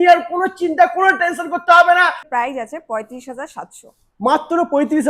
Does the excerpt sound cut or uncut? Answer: cut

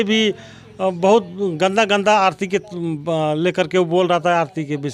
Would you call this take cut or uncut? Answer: uncut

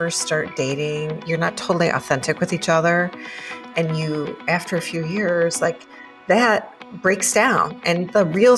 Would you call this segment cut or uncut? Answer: cut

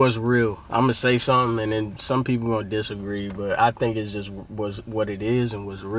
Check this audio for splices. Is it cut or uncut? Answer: uncut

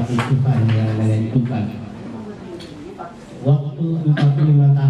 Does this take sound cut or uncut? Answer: uncut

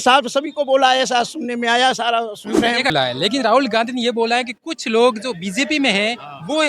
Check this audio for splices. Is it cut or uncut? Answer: cut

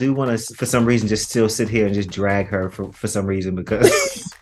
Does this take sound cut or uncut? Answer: uncut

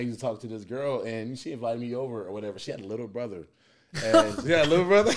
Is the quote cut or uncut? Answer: uncut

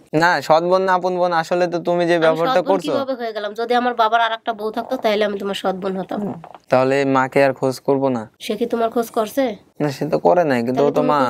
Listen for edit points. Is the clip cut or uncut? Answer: cut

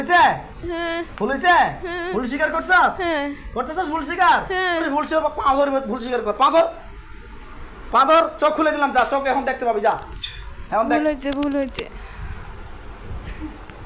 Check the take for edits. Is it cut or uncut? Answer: cut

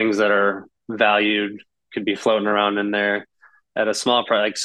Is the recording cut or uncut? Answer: uncut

